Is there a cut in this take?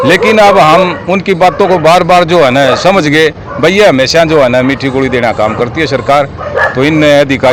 no; 0 cuts

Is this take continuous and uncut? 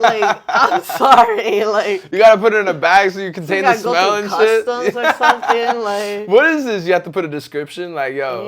yes; 0 cuts

